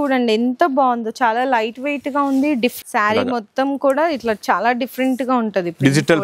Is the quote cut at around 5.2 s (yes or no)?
no